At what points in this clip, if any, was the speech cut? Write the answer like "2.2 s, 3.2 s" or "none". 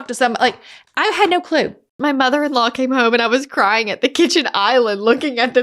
2.0 s